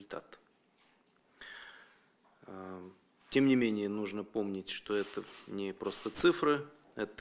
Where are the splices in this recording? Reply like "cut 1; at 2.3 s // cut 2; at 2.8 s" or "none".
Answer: none